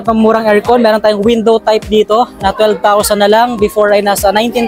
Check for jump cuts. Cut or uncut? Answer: uncut